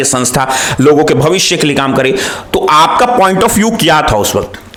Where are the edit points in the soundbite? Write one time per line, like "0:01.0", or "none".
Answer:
none